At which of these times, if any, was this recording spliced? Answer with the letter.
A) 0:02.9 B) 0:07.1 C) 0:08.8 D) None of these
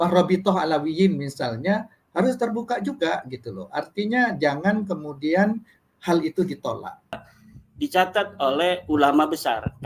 B